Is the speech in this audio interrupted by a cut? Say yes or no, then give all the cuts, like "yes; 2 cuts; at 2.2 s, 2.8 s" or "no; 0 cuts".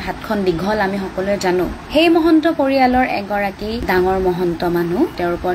no; 0 cuts